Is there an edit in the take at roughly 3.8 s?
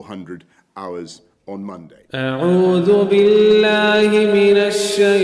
no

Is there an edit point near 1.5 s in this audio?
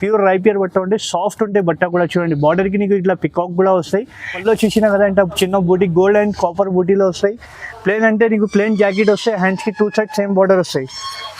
no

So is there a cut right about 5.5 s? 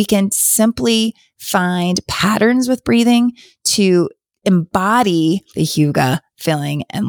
yes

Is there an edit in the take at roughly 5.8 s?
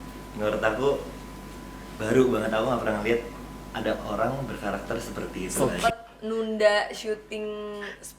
yes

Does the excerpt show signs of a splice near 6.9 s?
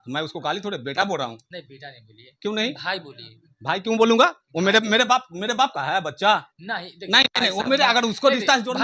no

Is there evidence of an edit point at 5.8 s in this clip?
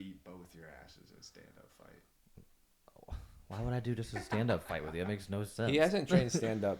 no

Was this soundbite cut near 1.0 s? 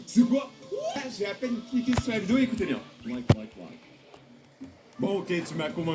yes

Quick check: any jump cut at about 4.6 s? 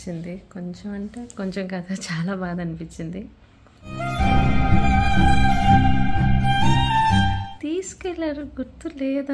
no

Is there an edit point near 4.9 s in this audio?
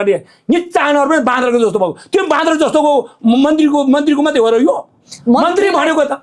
no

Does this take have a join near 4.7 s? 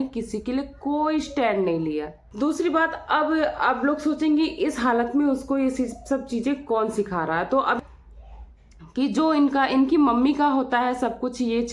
no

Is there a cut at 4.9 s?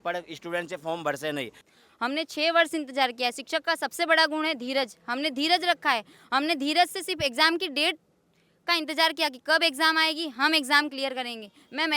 no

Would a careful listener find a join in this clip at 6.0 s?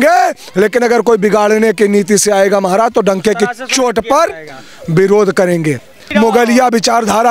yes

